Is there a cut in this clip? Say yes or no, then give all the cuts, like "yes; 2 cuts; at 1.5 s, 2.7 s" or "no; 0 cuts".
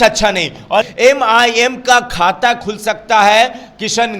yes; 1 cut; at 0.9 s